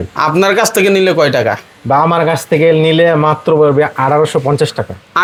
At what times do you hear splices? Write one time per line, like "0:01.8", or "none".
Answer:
none